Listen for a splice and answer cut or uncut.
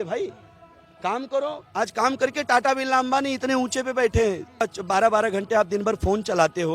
cut